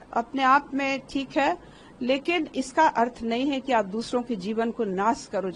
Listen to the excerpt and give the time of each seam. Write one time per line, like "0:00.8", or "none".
none